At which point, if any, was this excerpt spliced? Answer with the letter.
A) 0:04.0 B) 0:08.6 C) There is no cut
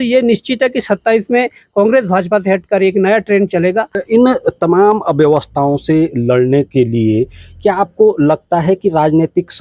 A